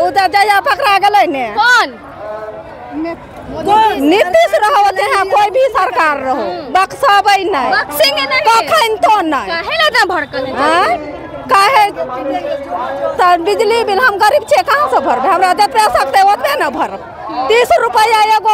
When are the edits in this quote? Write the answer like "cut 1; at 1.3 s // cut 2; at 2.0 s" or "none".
none